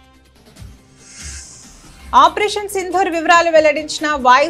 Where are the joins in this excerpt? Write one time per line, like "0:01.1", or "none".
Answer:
0:02.1